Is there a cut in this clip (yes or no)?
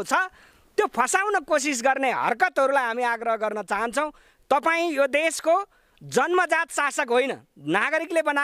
no